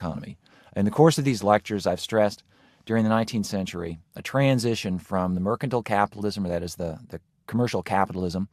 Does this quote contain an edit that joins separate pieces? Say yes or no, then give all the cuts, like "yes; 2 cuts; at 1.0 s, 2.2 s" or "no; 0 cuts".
no; 0 cuts